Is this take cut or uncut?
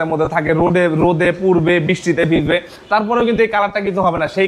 uncut